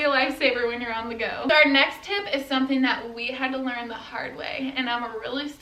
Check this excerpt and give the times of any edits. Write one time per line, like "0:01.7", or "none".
none